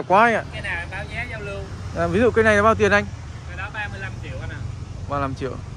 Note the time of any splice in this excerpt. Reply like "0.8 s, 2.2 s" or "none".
none